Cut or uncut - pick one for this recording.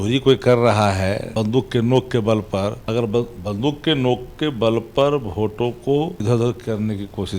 cut